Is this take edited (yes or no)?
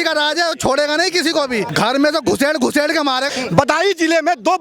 yes